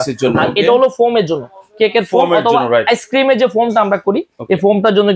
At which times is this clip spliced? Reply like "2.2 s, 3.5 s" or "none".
none